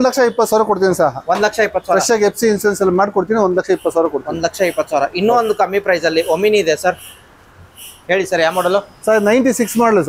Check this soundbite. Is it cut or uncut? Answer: uncut